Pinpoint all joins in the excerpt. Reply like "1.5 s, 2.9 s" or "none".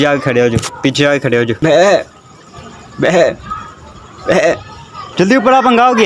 1.5 s, 5.0 s